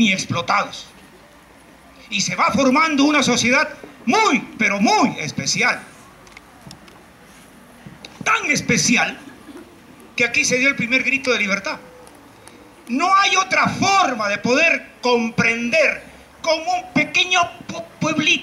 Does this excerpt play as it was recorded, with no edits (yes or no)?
yes